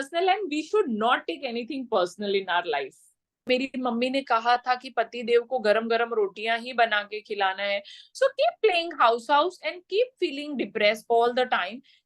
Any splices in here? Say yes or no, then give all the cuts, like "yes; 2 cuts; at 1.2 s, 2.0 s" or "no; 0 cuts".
yes; 1 cut; at 3.5 s